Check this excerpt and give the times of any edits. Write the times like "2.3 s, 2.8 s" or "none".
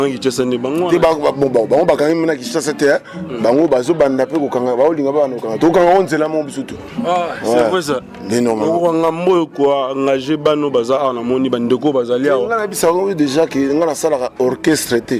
none